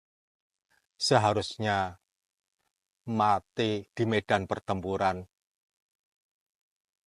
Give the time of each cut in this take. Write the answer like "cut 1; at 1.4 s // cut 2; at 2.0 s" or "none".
cut 1; at 3.9 s